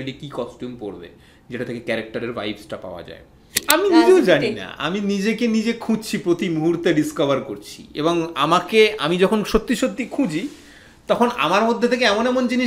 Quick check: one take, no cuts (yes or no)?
no